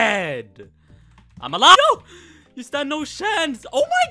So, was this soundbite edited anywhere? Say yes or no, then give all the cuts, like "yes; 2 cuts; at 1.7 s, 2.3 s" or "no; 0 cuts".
yes; 1 cut; at 1.8 s